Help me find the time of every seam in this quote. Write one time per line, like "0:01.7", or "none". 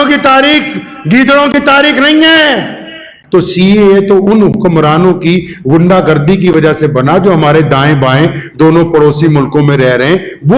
0:03.1